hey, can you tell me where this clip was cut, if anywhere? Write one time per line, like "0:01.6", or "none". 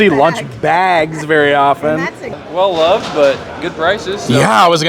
0:02.4